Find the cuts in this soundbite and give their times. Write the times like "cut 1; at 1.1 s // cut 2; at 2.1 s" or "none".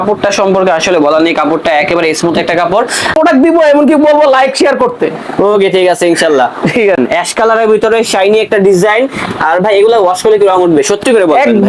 cut 1; at 3.1 s // cut 2; at 7.0 s

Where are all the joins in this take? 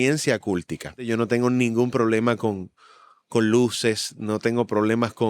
cut 1; at 1.1 s

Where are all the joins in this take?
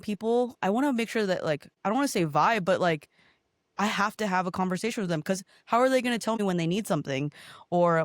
cut 1; at 1.7 s // cut 2; at 6.4 s

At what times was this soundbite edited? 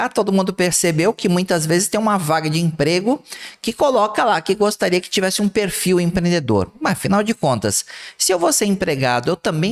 none

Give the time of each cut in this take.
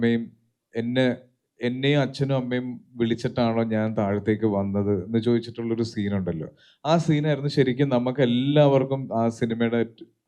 none

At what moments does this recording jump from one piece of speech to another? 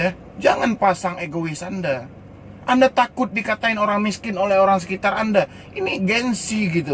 none

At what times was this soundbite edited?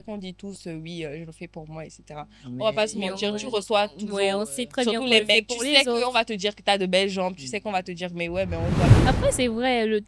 cut 1; at 8.9 s

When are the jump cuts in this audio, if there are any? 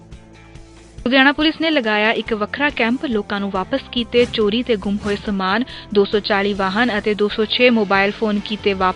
cut 1; at 1.0 s

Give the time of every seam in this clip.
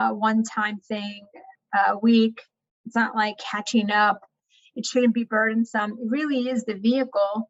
none

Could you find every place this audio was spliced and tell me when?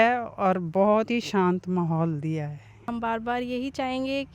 cut 1; at 2.8 s

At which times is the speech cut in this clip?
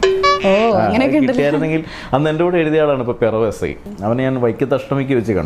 cut 1; at 3.9 s

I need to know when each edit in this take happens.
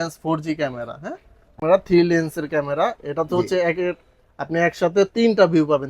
cut 1; at 1.6 s

